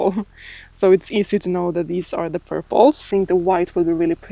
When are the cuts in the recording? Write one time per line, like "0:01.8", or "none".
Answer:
0:03.0